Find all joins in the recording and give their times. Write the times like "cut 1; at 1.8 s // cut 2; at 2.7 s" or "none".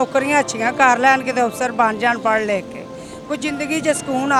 none